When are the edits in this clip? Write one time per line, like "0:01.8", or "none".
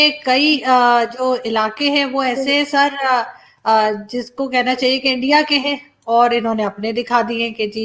none